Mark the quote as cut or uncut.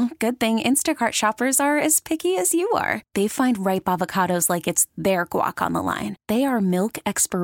uncut